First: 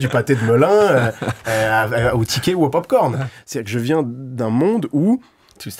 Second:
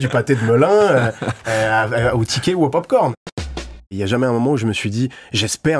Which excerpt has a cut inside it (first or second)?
second